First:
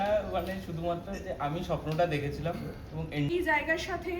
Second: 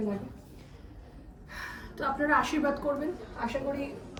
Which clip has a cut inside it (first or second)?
first